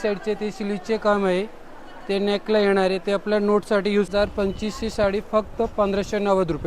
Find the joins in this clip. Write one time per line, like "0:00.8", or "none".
0:04.1

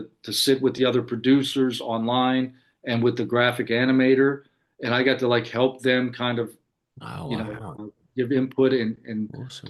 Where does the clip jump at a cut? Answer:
none

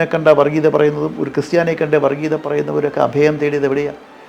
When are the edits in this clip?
none

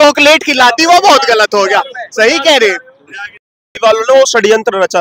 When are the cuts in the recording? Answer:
0:03.6

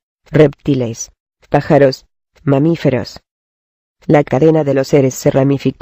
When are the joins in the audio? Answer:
0:01.4

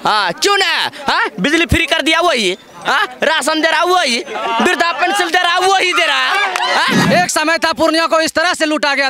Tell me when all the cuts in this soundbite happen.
0:07.0

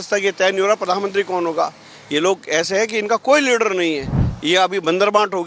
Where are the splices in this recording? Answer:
none

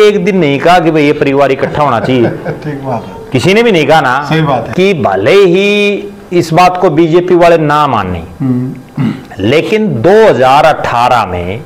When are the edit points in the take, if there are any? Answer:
0:04.7

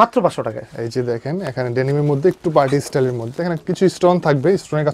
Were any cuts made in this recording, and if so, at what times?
none

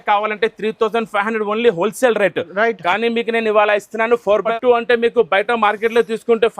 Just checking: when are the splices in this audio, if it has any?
0:04.4

